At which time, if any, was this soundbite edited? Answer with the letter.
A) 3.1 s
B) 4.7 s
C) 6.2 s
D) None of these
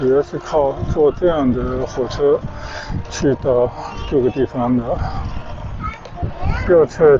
C